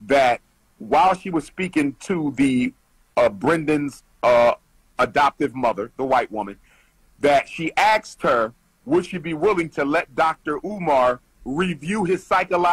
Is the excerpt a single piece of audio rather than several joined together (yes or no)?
yes